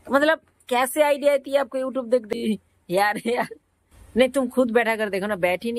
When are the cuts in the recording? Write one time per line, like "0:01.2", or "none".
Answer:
0:02.2